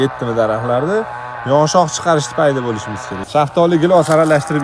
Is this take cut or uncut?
cut